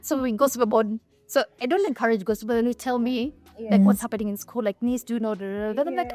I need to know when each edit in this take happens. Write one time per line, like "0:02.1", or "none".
none

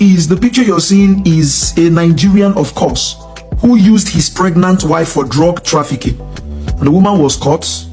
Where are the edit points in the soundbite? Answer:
none

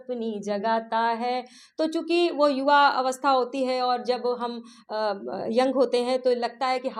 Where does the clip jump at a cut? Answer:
none

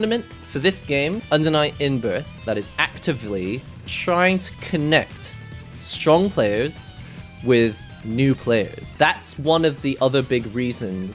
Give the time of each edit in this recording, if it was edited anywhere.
0:01.2
0:02.4
0:08.8

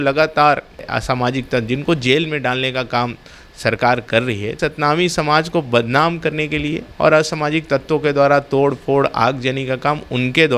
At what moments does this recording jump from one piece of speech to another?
0:00.9
0:04.6
0:06.9

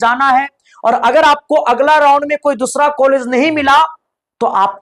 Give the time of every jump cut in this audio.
none

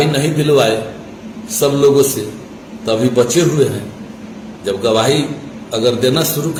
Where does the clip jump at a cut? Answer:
none

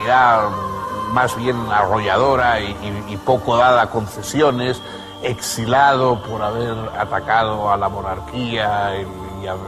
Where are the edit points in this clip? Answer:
none

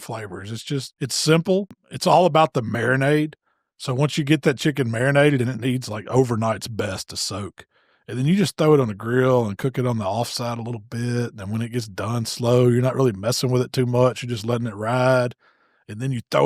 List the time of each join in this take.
0:00.9
0:01.8

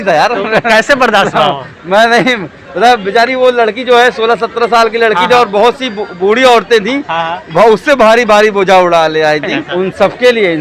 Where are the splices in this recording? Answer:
0:09.6

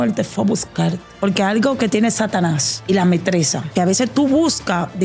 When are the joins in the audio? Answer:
0:01.1
0:02.7
0:03.6

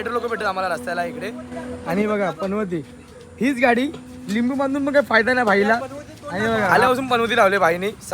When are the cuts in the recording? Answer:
0:06.7

